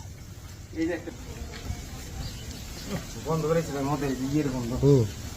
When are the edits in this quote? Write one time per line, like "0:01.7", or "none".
0:01.1